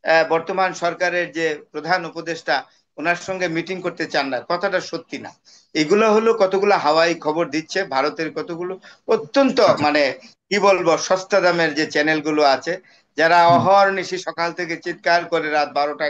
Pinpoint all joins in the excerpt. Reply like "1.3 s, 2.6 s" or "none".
none